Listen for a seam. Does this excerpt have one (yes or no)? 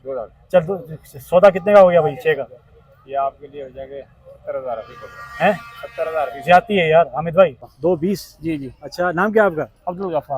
yes